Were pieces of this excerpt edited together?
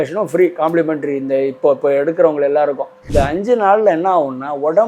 yes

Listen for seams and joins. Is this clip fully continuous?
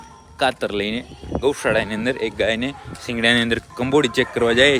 yes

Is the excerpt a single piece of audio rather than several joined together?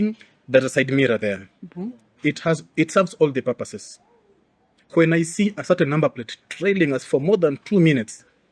yes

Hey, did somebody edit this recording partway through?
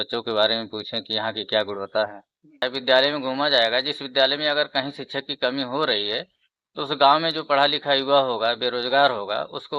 yes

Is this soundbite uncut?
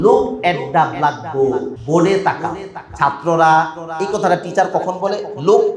no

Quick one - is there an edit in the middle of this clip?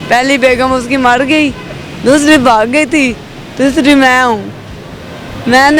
no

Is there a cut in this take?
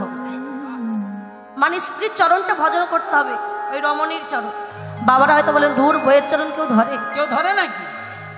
no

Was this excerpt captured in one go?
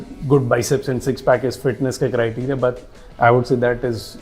yes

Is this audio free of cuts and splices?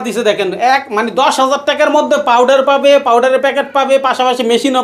yes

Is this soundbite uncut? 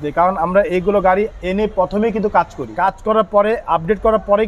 no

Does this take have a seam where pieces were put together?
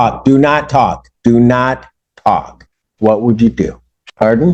no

